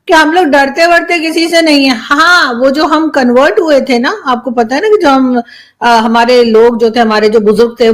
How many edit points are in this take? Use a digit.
0